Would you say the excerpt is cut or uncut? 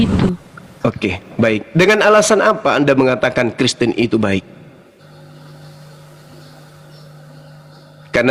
uncut